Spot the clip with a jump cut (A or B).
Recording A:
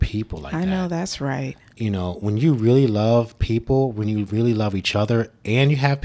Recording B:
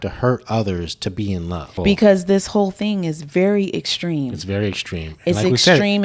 B